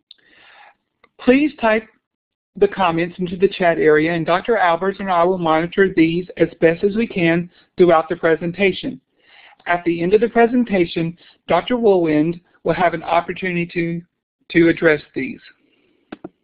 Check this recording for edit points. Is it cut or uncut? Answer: uncut